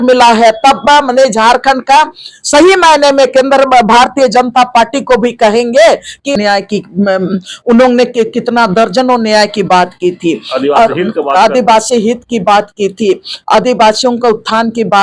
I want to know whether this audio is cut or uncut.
cut